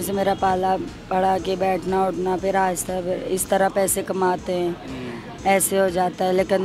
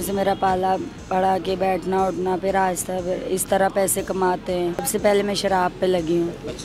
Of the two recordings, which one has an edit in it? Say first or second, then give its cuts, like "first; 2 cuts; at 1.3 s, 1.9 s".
second; 1 cut; at 4.9 s